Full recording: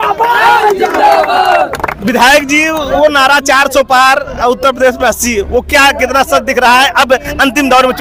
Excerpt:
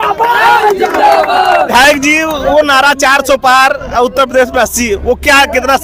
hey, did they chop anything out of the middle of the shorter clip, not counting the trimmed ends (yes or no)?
yes